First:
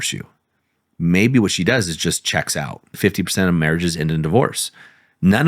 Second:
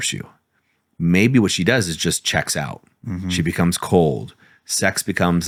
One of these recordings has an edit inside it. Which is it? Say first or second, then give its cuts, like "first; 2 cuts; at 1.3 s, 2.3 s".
first; 1 cut; at 2.9 s